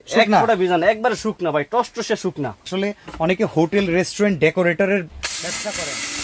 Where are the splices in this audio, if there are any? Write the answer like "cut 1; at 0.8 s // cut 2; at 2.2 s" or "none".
cut 1; at 2.7 s